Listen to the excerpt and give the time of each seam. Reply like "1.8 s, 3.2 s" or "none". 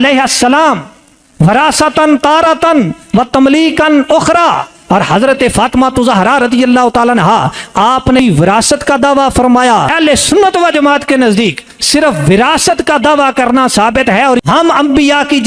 8.2 s, 9.9 s, 14.4 s